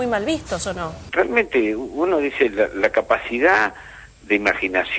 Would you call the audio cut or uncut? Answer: cut